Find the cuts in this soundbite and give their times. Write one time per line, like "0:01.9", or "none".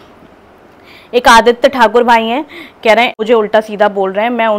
0:03.1